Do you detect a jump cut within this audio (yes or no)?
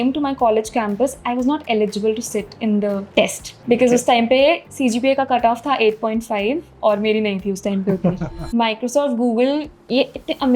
yes